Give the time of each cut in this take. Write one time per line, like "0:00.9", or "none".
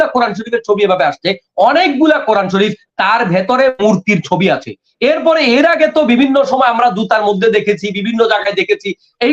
none